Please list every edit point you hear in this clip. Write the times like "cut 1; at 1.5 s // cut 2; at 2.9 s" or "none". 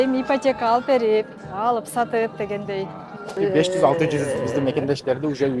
cut 1; at 3.4 s